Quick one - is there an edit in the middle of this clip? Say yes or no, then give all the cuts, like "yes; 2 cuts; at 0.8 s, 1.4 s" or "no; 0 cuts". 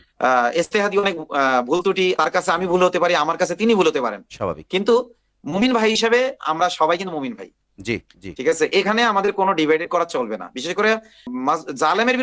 yes; 2 cuts; at 2.2 s, 11.3 s